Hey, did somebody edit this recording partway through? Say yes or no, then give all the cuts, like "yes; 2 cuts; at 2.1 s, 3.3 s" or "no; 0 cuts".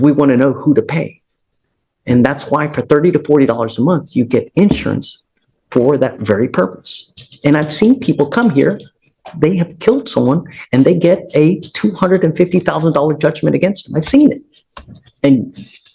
no; 0 cuts